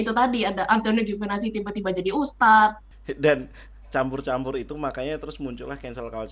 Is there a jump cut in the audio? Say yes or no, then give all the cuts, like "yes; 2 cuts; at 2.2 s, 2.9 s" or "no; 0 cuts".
yes; 1 cut; at 2.9 s